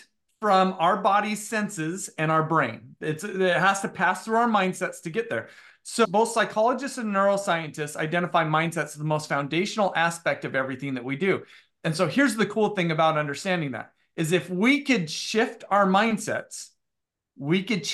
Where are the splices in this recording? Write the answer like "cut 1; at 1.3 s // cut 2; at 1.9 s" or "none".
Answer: cut 1; at 6.1 s